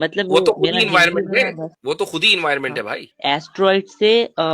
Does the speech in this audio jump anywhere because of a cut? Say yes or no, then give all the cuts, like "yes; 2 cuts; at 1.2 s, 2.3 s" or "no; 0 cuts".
yes; 2 cuts; at 1.7 s, 3.0 s